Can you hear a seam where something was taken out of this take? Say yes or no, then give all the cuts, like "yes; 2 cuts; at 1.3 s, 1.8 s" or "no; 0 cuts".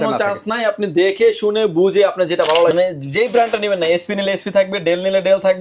yes; 1 cut; at 2.7 s